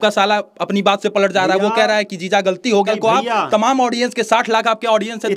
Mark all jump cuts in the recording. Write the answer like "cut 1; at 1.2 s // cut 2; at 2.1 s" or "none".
cut 1; at 2.9 s